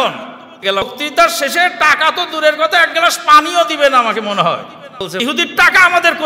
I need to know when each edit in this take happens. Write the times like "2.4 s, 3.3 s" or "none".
0.8 s, 5.2 s